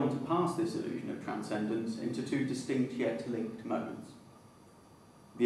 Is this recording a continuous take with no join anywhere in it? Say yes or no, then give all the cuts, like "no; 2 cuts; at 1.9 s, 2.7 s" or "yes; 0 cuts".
no; 1 cut; at 3.3 s